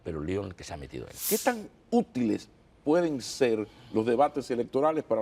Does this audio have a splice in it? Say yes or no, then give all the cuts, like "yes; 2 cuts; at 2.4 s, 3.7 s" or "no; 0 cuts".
yes; 1 cut; at 1.2 s